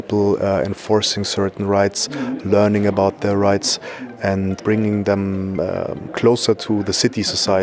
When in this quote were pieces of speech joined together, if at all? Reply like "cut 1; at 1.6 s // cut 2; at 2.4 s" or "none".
cut 1; at 4.6 s // cut 2; at 6.6 s